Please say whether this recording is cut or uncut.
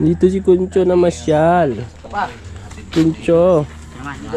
uncut